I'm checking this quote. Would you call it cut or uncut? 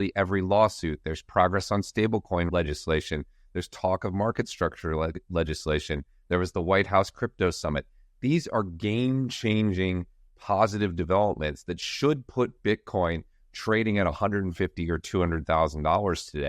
cut